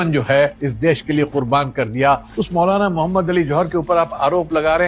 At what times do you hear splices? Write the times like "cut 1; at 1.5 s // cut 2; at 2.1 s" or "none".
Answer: cut 1; at 2.3 s